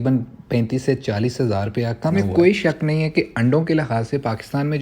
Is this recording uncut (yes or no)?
no